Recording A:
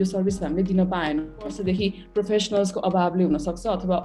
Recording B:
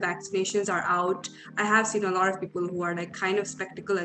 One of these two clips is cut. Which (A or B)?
A